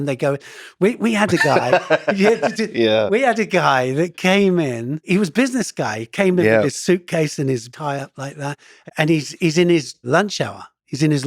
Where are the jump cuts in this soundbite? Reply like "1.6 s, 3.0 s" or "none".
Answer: 5.1 s, 7.7 s, 8.7 s, 10.0 s